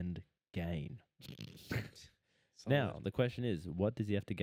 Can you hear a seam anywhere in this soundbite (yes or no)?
no